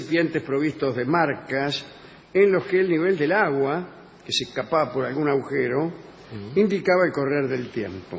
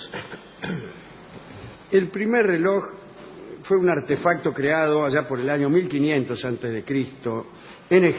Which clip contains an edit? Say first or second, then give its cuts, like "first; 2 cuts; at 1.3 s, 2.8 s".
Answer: second; 1 cut; at 1.9 s